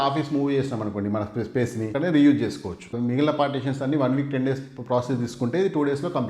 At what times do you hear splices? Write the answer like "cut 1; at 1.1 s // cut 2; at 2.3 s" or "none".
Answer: cut 1; at 1.9 s // cut 2; at 2.9 s